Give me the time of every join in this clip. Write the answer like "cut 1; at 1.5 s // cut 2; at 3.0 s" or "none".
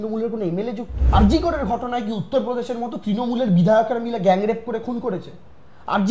cut 1; at 0.9 s